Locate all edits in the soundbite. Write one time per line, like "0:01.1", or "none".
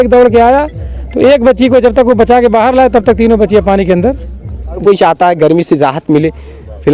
0:04.8